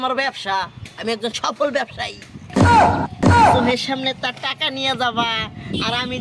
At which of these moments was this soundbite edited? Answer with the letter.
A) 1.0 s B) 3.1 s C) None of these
B